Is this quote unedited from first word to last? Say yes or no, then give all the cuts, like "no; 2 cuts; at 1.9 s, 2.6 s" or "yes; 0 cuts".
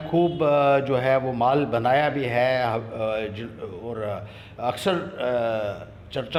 yes; 0 cuts